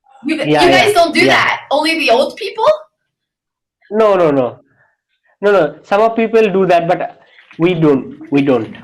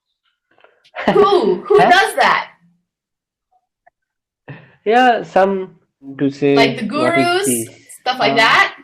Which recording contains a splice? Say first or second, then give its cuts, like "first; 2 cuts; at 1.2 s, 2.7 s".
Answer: second; 1 cut; at 6.2 s